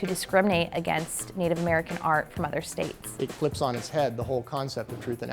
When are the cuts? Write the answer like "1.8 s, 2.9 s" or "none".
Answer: 3.2 s